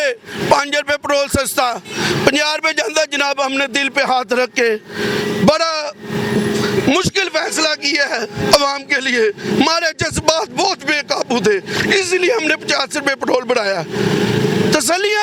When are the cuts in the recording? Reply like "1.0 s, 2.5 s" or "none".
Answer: none